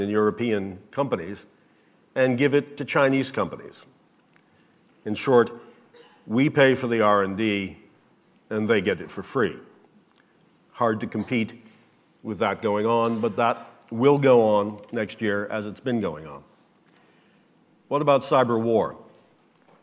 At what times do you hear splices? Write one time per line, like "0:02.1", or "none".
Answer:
none